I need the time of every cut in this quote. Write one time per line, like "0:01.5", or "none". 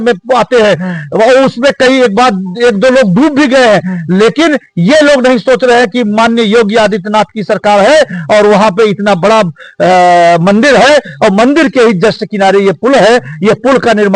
none